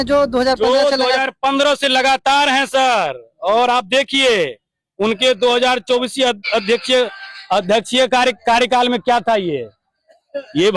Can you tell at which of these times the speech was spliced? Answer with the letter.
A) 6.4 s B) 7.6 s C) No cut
C